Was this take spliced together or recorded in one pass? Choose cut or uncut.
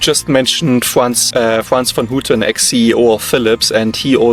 uncut